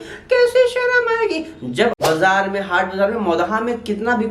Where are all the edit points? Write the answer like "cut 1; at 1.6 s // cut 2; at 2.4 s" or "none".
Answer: cut 1; at 2.0 s